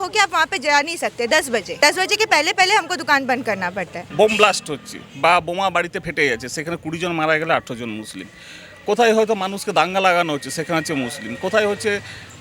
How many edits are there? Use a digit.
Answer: 2